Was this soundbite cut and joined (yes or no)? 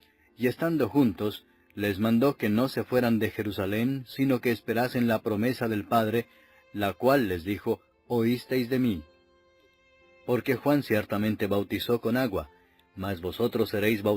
no